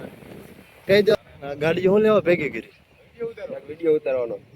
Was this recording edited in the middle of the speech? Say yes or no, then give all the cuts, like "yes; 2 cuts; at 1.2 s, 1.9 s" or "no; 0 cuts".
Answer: yes; 1 cut; at 1.2 s